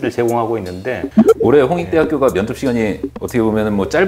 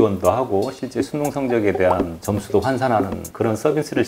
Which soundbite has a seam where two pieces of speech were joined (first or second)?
first